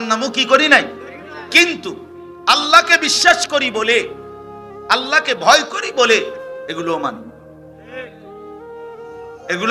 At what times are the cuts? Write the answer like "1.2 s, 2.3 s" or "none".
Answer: none